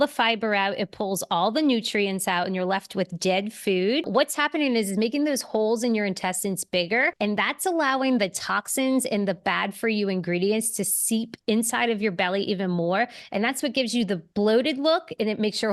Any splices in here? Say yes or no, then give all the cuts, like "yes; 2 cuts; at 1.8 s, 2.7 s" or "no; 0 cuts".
yes; 2 cuts; at 4.1 s, 7.1 s